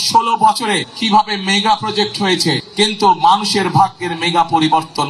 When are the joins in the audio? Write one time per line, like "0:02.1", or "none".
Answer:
0:00.9
0:02.6